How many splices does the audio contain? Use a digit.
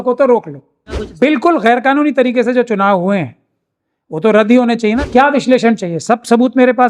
2